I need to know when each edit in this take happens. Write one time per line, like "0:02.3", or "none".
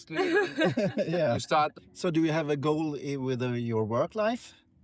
0:01.8